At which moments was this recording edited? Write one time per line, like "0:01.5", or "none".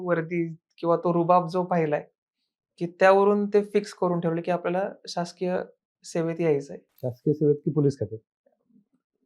none